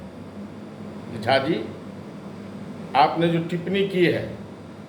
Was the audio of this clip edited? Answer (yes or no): no